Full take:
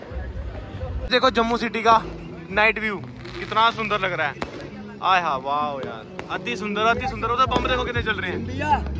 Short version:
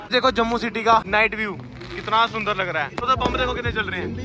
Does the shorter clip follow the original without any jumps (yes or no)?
no